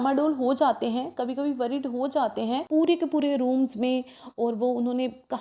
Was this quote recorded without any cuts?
no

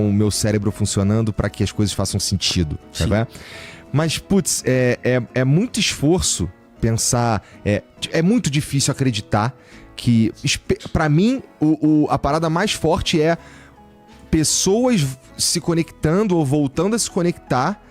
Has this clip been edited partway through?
no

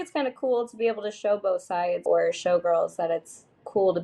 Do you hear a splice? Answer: yes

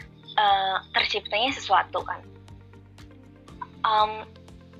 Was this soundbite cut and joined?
no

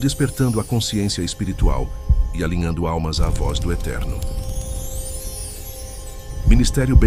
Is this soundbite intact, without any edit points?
yes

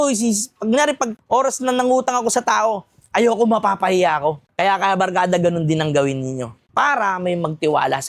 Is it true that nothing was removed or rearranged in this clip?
yes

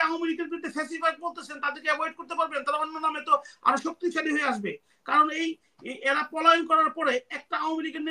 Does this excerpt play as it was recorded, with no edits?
yes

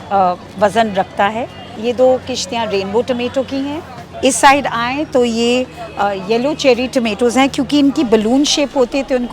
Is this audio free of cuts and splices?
no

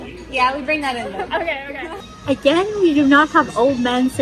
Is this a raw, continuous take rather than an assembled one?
no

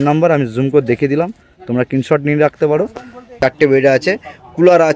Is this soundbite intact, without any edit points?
no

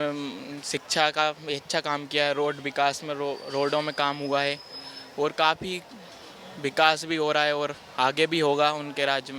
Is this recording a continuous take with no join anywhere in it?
yes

